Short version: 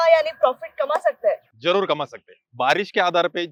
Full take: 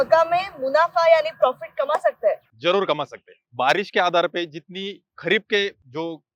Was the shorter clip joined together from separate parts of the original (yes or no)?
no